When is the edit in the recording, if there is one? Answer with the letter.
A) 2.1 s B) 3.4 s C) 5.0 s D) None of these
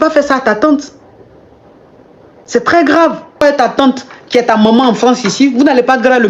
B